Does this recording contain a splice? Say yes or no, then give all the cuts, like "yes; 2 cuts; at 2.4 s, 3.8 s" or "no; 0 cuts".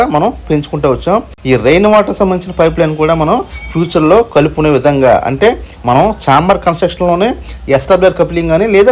no; 0 cuts